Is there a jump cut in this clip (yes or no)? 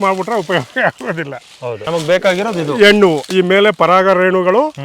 yes